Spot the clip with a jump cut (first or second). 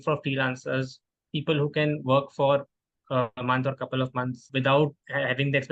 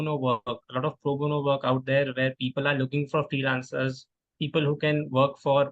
first